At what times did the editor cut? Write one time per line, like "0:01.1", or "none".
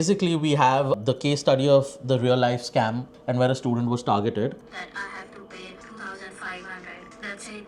0:03.1
0:04.7